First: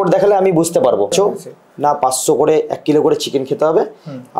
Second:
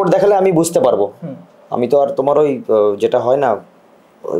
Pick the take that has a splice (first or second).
first